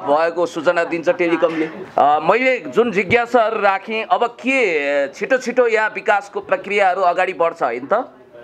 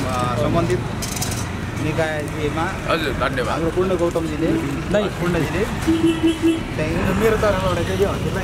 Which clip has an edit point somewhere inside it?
first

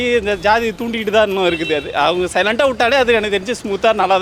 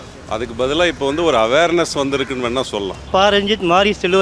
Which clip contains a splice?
second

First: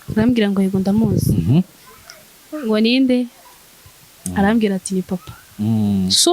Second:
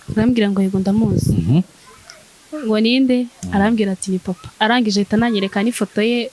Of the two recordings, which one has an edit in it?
second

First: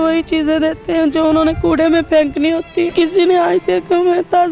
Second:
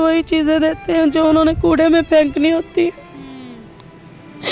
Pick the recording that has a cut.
first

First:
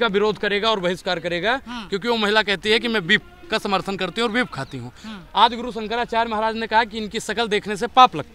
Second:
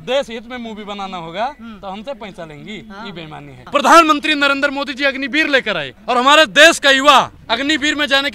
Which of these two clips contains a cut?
second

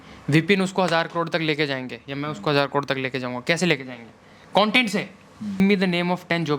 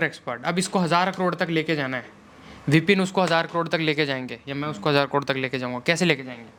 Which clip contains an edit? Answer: first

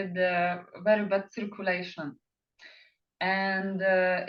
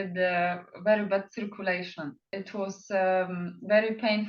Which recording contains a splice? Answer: second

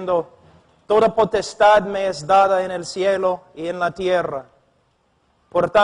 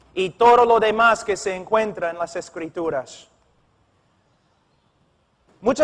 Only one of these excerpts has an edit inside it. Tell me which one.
first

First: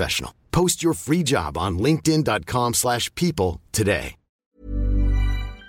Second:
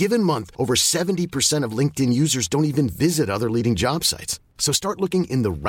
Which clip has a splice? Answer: first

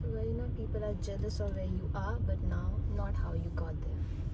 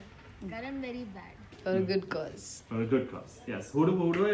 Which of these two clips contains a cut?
second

